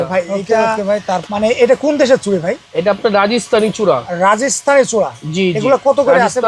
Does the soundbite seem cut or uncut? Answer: cut